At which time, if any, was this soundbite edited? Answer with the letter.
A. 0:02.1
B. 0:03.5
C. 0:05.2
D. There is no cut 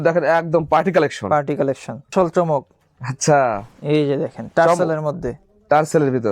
A